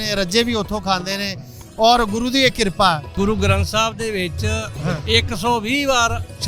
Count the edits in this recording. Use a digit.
2